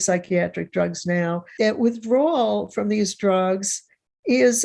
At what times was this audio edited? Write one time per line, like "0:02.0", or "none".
0:01.5